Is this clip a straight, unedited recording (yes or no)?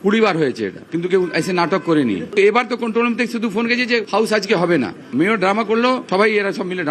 no